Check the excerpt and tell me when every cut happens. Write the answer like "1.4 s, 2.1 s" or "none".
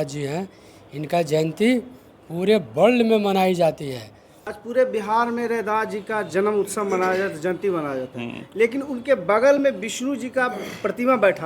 4.3 s